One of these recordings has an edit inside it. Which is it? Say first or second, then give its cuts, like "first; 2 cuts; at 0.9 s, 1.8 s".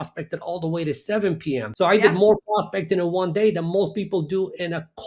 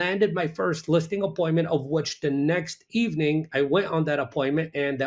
first; 1 cut; at 1.7 s